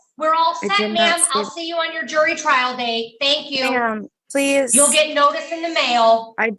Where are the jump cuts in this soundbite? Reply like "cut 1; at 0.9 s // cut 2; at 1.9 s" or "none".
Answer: none